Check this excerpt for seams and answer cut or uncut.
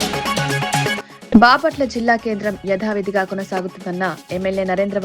cut